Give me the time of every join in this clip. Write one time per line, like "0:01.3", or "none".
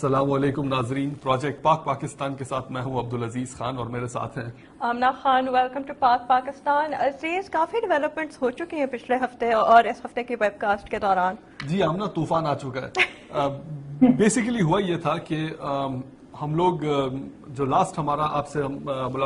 none